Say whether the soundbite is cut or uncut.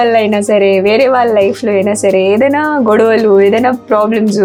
uncut